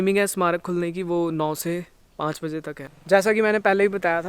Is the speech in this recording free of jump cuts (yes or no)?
no